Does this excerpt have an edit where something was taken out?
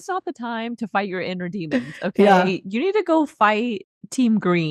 no; 0 cuts

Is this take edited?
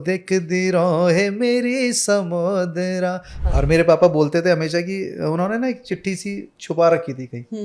yes; 1 cut; at 3.3 s

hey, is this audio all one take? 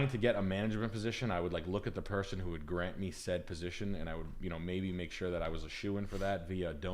yes; 0 cuts

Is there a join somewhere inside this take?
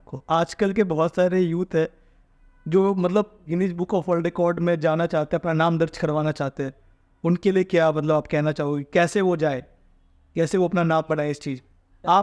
no; 0 cuts

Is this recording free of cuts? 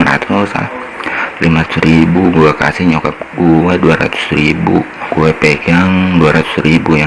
no; 1 cut; at 5.0 s

